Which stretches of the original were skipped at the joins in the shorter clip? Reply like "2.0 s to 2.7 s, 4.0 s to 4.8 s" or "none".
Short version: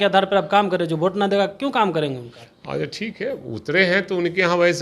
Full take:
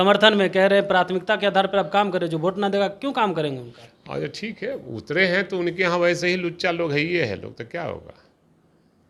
none